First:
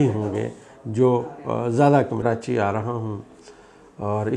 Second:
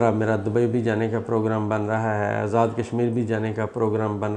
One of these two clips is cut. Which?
first; 1 cut; at 2.2 s

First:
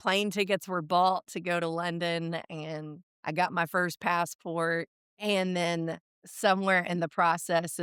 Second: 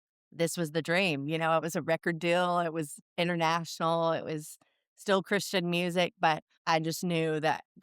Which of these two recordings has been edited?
second; 1 cut; at 6.5 s

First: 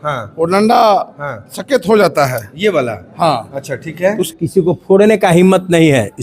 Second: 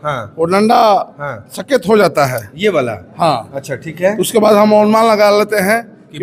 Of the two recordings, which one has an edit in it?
first; 1 cut; at 4.3 s

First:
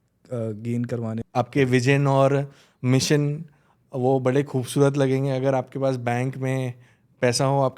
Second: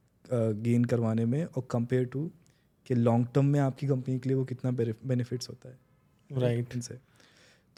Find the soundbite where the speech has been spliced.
first; 1 cut; at 1.2 s

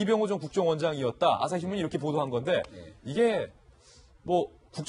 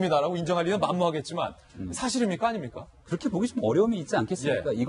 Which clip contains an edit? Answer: first; 1 cut; at 2.3 s

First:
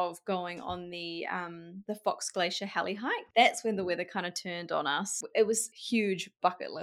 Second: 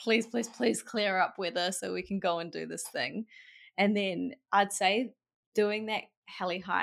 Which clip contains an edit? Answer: first; 4 cuts; at 1.7 s, 3.2 s, 5.1 s, 5.7 s

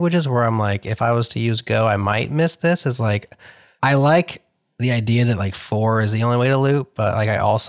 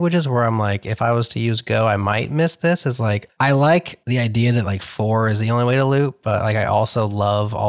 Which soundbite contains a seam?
second; 2 cuts; at 3.3 s, 4.0 s

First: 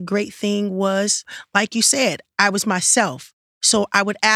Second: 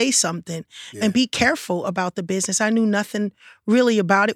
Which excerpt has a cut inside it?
second; 1 cut; at 1.0 s

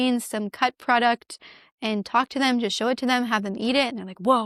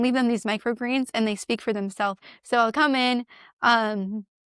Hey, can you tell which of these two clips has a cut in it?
second; 1 cut; at 2.3 s

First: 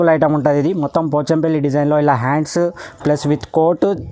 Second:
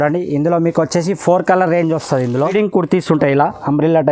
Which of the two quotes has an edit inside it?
second; 1 cut; at 2.5 s

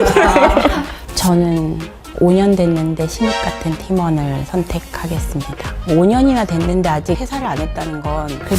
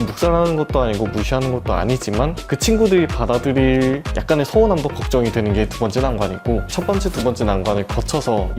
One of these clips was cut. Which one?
first; 2 cuts; at 1.0 s, 7.3 s

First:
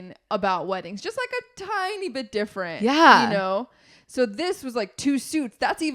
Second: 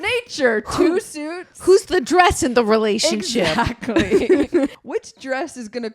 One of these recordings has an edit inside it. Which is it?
second; 1 cut; at 4.7 s

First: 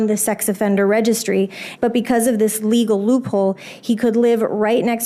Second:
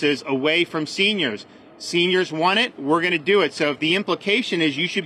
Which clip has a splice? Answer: first; 1 cut; at 1.6 s

